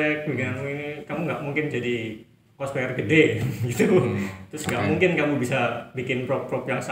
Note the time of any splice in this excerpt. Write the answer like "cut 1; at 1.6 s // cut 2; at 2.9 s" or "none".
none